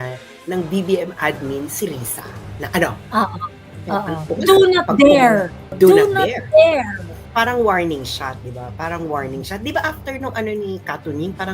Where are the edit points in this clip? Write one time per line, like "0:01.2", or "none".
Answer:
0:04.2
0:05.7
0:07.2